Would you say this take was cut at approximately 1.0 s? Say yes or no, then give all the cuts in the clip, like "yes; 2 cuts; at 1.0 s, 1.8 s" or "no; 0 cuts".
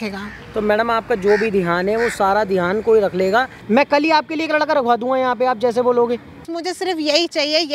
no; 2 cuts; at 3.6 s, 6.5 s